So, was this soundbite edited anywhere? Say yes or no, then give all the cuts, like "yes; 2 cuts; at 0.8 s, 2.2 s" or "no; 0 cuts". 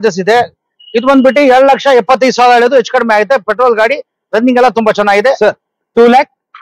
no; 0 cuts